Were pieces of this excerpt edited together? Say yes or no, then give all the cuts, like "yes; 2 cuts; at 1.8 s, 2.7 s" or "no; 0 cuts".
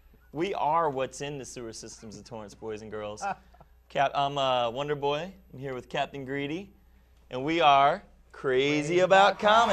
no; 0 cuts